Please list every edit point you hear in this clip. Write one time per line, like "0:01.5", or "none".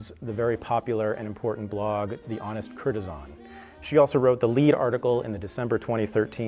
none

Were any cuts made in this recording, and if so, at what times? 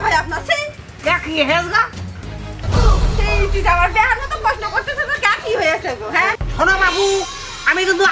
0:06.4

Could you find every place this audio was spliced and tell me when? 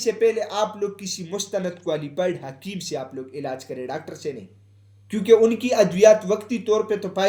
none

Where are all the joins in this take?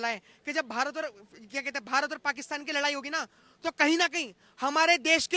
none

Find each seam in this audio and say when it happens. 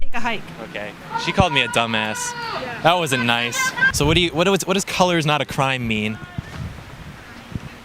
0:03.9

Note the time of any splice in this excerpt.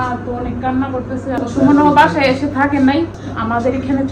0:01.4
0:03.2

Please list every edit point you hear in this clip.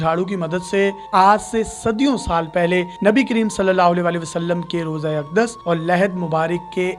0:01.0

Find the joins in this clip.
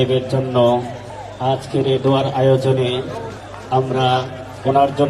none

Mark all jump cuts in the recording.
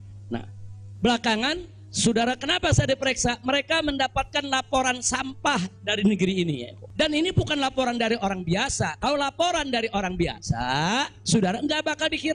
0:06.8

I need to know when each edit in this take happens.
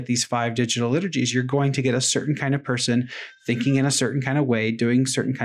none

